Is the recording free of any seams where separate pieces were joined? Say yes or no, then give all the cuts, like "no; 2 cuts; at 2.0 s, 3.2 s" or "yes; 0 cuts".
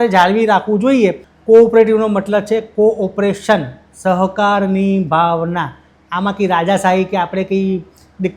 no; 1 cut; at 1.3 s